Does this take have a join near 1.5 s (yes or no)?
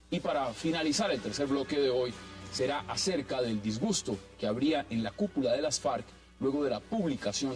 yes